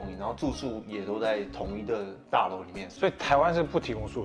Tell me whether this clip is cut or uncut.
cut